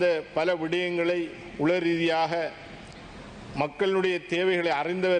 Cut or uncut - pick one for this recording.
uncut